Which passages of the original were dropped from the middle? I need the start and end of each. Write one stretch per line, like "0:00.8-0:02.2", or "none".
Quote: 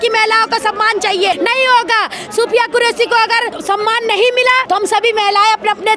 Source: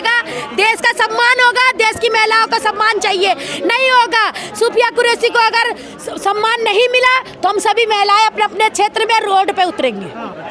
0:03.4-0:03.6
0:05.8-0:06.1
0:07.2-0:07.4